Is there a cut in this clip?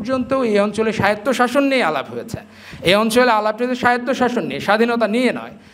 no; 0 cuts

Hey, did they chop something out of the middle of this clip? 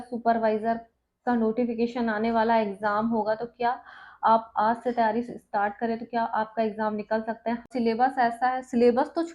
yes; 1 cut; at 7.7 s

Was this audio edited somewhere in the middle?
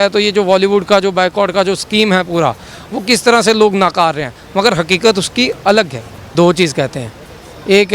yes; 1 cut; at 6.3 s

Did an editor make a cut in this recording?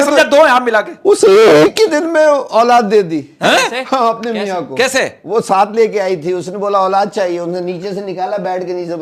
no; 0 cuts

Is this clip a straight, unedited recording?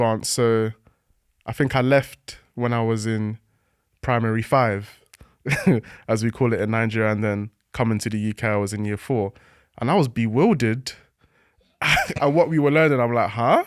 yes; 0 cuts

